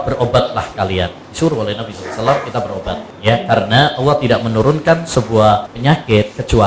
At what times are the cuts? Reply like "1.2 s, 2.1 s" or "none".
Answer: 1.2 s, 3.1 s, 5.7 s